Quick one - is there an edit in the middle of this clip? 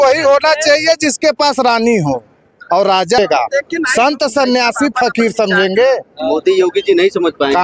yes; 1 cut; at 3.2 s

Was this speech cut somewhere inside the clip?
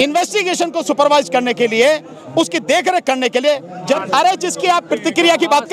yes; 1 cut; at 4.0 s

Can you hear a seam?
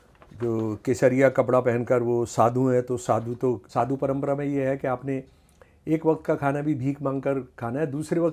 yes; 1 cut; at 3.6 s

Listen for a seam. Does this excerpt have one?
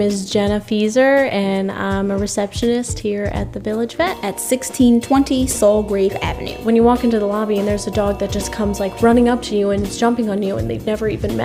yes; 1 cut; at 6.5 s

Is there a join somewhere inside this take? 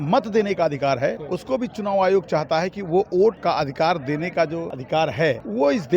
yes; 3 cuts; at 1.3 s, 3.4 s, 5.0 s

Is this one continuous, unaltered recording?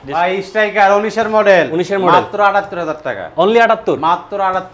yes; 0 cuts

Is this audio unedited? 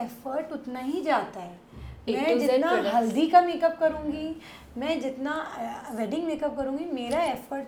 yes; 0 cuts

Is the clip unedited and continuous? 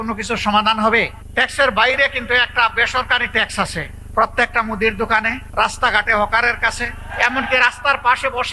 no; 4 cuts; at 1.2 s, 4.0 s, 5.4 s, 7.1 s

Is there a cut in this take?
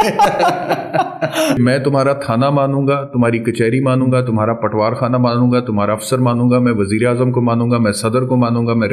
yes; 1 cut; at 1.6 s

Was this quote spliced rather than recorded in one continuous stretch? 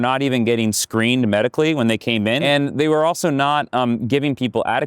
yes; 1 cut; at 2.4 s

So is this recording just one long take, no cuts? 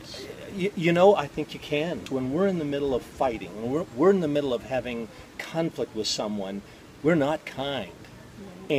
no; 1 cut; at 2.0 s

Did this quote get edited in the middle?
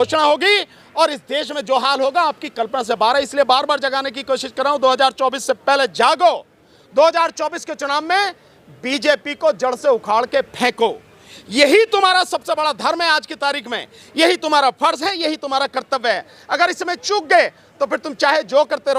no; 0 cuts

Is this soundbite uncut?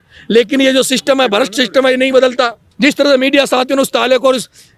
no; 1 cut; at 2.6 s

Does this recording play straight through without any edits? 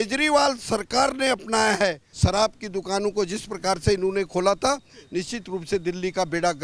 no; 1 cut; at 2.1 s

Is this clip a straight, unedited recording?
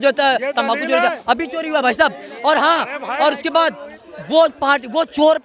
yes; 0 cuts

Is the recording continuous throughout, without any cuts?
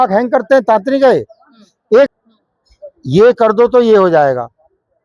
no; 1 cut; at 2.1 s

